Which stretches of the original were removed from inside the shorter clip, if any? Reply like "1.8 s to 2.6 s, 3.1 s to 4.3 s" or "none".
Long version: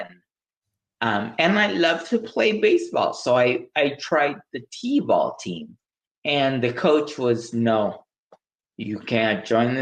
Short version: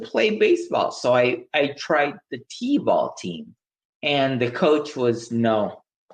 none

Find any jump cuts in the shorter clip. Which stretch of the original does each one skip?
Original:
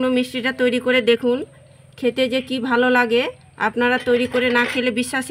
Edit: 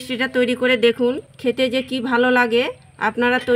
1.2 s to 1.6 s

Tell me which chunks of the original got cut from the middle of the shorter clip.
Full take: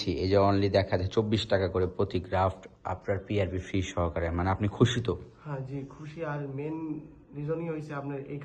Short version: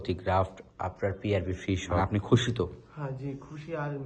4.0 s to 4.5 s

